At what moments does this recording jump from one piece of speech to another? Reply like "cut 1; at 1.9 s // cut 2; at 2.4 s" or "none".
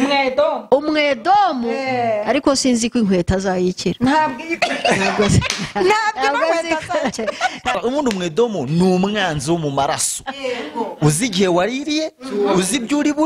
cut 1; at 7.7 s